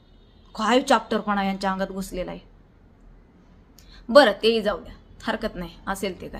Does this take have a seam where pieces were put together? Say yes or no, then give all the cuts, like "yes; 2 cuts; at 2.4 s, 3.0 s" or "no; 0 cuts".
no; 0 cuts